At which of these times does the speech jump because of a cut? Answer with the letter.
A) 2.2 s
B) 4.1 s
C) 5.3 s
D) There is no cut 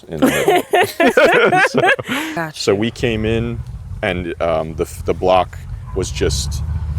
A